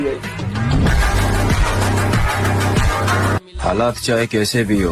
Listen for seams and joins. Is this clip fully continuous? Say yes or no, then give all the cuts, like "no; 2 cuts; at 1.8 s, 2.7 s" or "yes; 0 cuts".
yes; 0 cuts